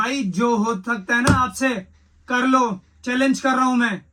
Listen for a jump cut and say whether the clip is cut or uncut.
uncut